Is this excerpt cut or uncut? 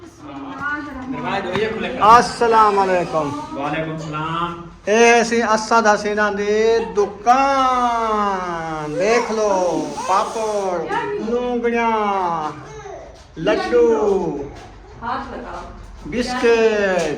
cut